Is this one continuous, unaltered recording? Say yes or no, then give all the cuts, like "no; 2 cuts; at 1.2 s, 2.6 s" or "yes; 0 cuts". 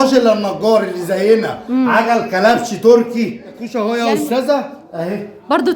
no; 1 cut; at 3.7 s